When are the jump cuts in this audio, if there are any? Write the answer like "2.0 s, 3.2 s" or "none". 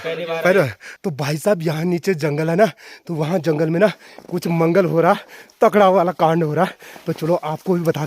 1.0 s